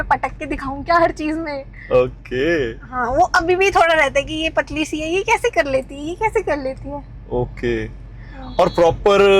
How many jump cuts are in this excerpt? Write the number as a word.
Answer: zero